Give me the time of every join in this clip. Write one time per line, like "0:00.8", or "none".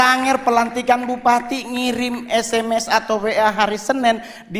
none